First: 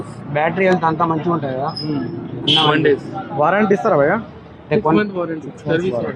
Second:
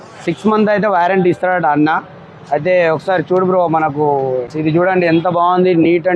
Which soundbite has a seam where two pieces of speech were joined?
second; 1 cut; at 4.5 s

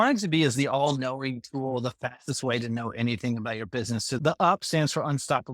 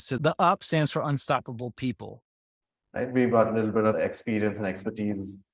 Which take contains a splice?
second; 1 cut; at 2.5 s

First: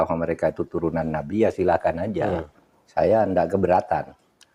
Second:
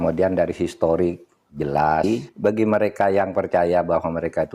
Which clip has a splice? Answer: second; 1 cut; at 2.0 s

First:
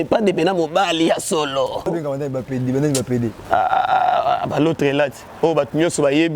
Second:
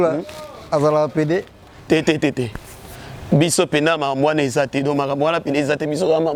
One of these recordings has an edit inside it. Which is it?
first; 1 cut; at 1.9 s

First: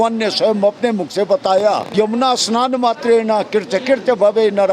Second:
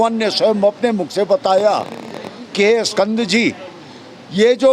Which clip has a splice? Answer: first; 1 cut; at 1.9 s

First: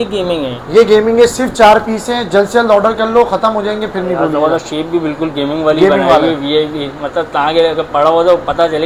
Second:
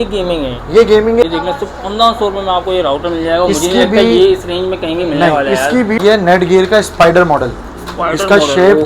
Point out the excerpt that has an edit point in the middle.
second; 2 cuts; at 1.2 s, 6.0 s

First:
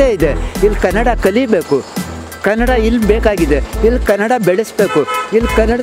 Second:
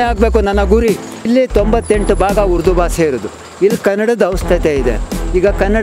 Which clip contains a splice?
second; 1 cut; at 1.3 s

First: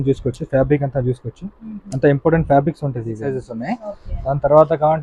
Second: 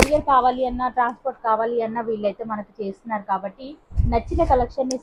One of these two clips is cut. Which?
first; 1 cut; at 3.3 s

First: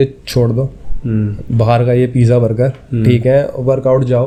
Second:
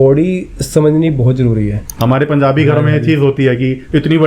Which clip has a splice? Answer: second; 1 cut; at 1.8 s

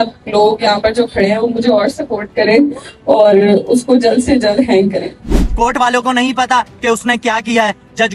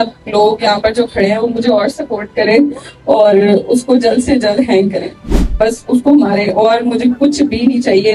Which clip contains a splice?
first; 1 cut; at 5.5 s

